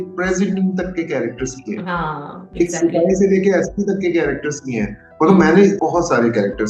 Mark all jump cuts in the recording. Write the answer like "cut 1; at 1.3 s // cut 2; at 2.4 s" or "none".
cut 1; at 5.8 s